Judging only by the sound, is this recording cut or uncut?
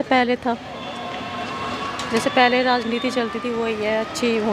uncut